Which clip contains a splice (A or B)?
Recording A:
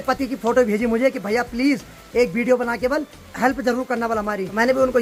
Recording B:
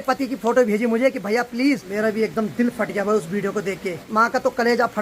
B